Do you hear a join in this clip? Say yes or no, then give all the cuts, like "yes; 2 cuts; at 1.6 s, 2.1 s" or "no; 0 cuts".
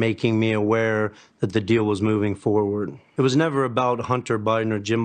yes; 1 cut; at 3.0 s